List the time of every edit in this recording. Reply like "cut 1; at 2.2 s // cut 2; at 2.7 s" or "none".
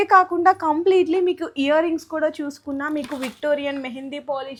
none